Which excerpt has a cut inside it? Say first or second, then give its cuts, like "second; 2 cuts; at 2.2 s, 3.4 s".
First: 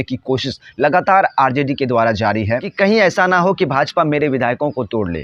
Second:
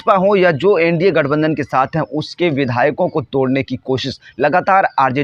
first; 1 cut; at 2.7 s